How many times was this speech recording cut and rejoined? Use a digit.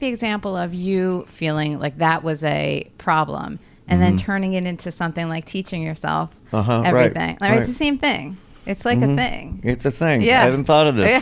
1